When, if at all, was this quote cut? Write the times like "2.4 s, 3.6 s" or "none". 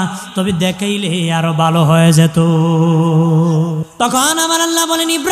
3.9 s